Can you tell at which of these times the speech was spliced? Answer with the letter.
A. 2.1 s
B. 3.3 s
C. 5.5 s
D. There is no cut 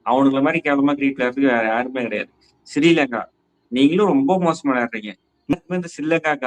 C